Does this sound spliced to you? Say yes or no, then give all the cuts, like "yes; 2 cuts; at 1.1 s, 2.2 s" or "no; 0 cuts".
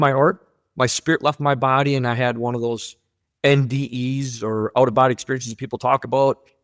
no; 0 cuts